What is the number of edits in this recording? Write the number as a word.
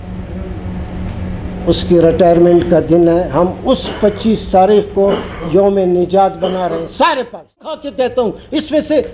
one